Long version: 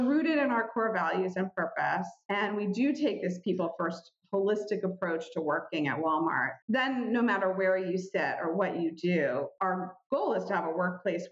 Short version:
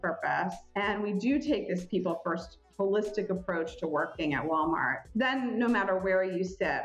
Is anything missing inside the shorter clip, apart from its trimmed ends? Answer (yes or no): no